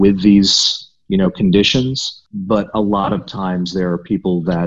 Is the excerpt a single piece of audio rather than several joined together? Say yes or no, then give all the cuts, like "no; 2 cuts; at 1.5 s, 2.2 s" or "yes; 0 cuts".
no; 1 cut; at 2.3 s